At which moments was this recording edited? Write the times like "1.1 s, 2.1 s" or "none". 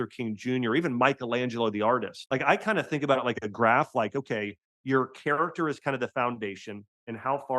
2.1 s